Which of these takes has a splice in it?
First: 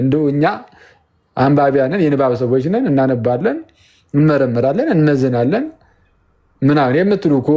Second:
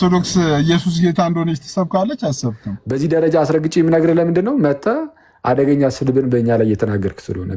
second; 1 cut; at 2.7 s

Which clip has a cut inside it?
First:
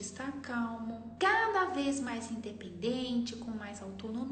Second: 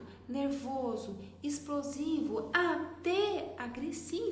first; 1 cut; at 1.1 s

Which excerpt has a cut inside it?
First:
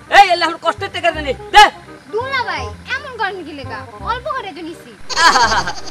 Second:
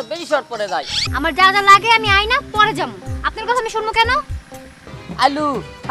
second; 2 cuts; at 1.1 s, 4.8 s

